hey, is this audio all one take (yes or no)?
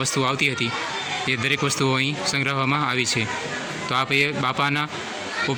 yes